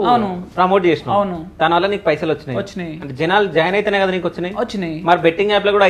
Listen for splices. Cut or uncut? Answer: uncut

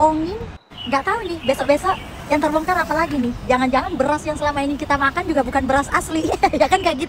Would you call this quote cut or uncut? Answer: uncut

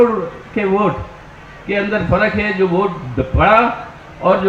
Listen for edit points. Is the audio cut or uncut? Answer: uncut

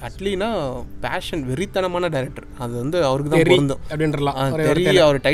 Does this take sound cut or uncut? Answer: uncut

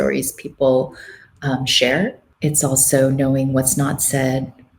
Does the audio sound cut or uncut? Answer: cut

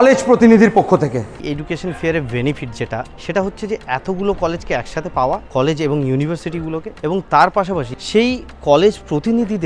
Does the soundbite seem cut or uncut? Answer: cut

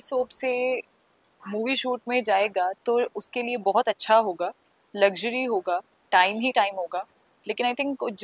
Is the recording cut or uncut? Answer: uncut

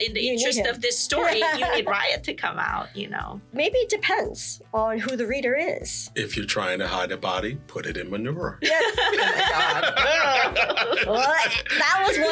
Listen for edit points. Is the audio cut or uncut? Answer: cut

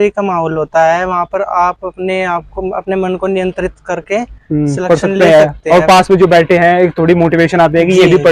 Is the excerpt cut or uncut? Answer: uncut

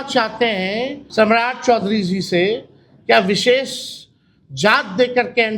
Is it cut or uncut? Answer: cut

